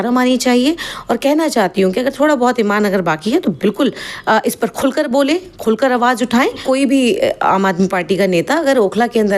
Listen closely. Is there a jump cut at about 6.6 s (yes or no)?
yes